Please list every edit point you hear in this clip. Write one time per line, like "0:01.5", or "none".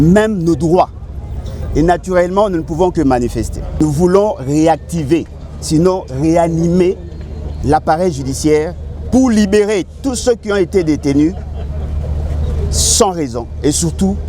0:03.8